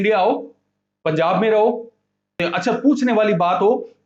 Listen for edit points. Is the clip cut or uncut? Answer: cut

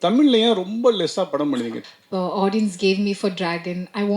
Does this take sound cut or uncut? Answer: cut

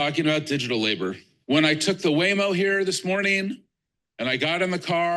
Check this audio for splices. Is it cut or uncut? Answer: cut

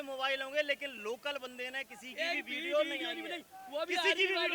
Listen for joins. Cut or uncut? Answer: uncut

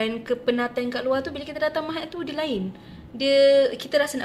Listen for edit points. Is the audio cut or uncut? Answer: uncut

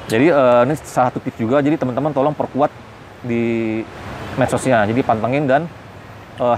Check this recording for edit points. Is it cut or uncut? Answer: uncut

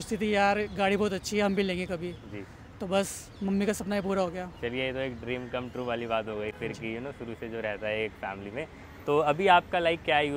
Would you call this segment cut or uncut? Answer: uncut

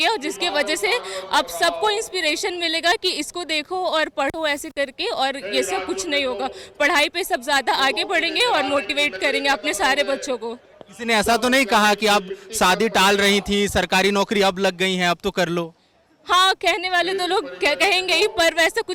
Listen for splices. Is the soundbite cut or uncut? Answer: uncut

